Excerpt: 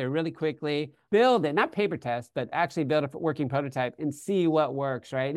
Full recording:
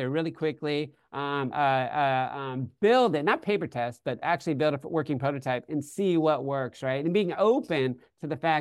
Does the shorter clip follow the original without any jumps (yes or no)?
no